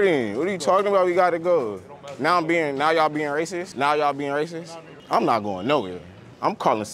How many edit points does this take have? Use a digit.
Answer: 2